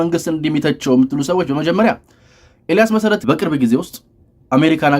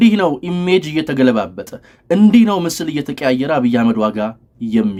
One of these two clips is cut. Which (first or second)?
first